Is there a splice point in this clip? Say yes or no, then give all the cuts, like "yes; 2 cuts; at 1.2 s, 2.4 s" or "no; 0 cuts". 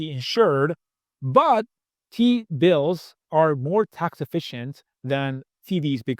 yes; 1 cut; at 1.8 s